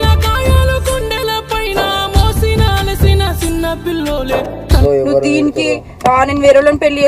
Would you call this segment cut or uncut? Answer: cut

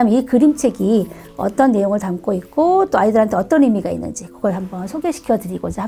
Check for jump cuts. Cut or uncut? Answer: uncut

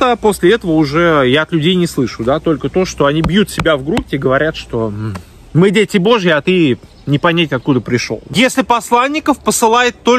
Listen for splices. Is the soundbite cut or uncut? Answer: cut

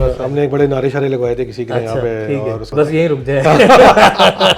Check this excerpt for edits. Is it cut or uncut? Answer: cut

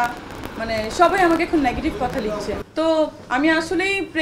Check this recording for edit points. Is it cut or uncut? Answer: uncut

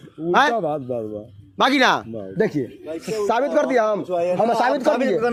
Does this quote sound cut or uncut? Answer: uncut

